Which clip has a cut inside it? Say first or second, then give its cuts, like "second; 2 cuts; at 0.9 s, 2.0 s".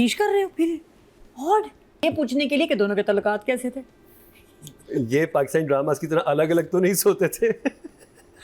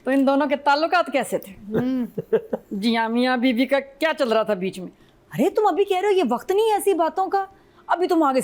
first; 1 cut; at 2.0 s